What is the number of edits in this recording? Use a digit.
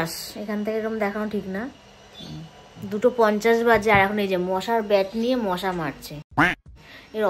0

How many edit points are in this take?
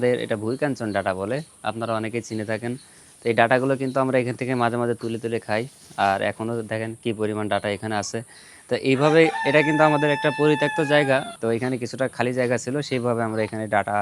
0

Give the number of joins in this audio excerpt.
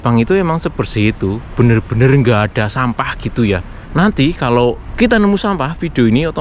2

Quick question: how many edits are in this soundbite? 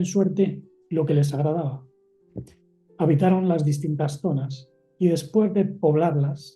0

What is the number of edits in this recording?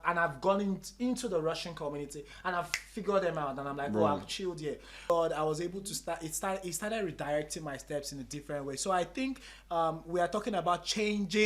1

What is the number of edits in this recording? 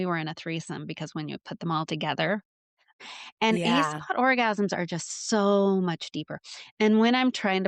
1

